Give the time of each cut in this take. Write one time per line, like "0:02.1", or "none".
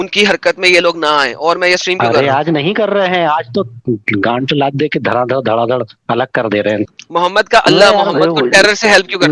0:06.9